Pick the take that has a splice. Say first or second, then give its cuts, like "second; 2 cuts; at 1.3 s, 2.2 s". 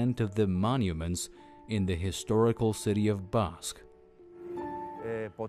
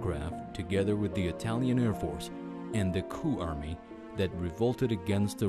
first; 1 cut; at 2.4 s